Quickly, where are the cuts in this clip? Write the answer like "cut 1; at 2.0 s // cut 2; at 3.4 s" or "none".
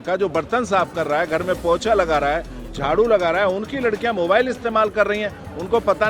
none